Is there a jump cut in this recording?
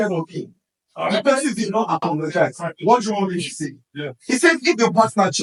no; 0 cuts

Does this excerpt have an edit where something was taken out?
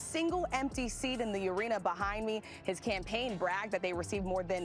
no; 0 cuts

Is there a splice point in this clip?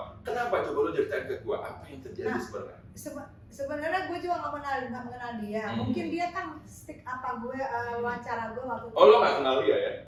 no; 0 cuts

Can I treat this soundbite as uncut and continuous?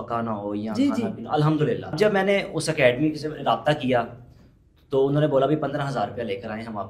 no; 1 cut; at 1.9 s

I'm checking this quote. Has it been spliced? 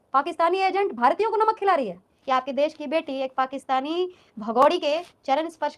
yes; 1 cut; at 2.1 s

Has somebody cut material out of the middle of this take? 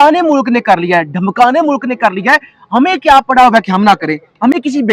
no; 0 cuts

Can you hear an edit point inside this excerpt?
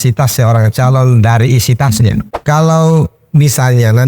yes; 1 cut; at 2.3 s

